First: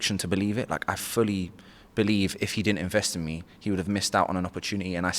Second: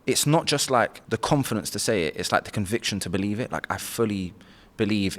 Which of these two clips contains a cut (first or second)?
second